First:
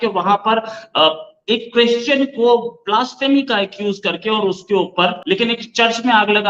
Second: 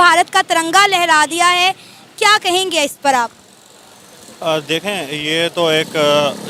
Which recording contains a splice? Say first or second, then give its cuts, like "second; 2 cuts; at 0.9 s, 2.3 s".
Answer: first; 1 cut; at 5.2 s